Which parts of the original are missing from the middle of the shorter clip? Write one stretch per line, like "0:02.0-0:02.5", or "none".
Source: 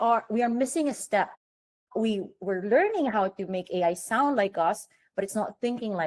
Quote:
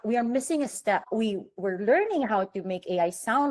0:01.3-0:01.9